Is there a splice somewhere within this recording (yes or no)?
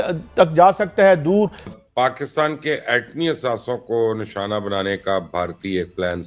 yes